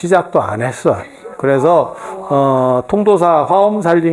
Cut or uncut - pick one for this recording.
uncut